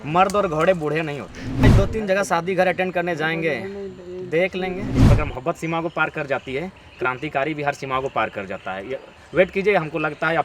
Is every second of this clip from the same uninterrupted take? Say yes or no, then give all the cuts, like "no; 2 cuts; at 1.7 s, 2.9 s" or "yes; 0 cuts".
no; 2 cuts; at 1.6 s, 4.9 s